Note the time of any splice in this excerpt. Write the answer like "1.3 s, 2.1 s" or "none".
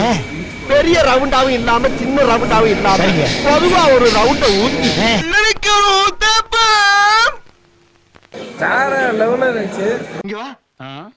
5.2 s, 8.5 s